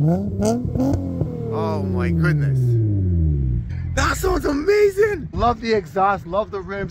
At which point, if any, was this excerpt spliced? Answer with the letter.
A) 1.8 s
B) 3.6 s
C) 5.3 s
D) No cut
C